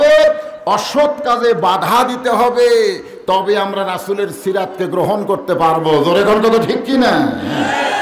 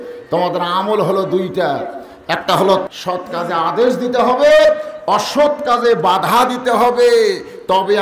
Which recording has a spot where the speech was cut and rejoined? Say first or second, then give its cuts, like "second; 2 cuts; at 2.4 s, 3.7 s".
second; 1 cut; at 2.8 s